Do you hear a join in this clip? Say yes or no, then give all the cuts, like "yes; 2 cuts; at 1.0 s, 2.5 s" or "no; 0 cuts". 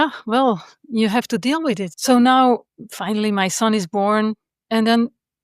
yes; 2 cuts; at 1.9 s, 2.7 s